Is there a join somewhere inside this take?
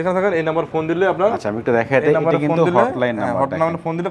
no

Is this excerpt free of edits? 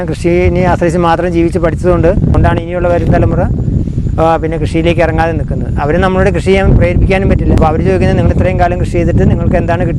no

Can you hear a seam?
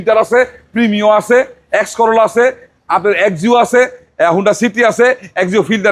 no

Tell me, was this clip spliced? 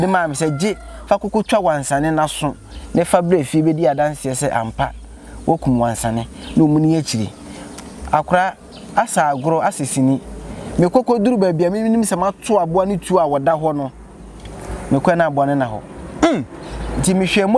no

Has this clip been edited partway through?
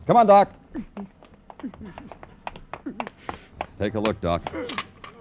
no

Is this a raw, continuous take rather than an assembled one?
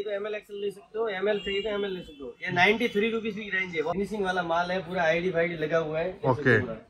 no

